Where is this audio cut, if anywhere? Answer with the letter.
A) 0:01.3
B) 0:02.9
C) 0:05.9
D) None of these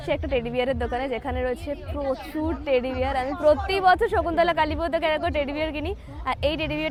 D